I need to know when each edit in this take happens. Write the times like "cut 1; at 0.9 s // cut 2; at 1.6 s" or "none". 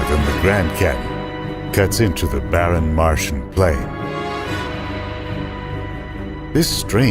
cut 1; at 3.9 s